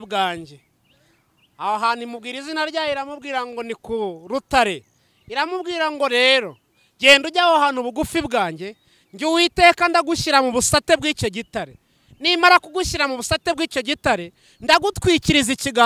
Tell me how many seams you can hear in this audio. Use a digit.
0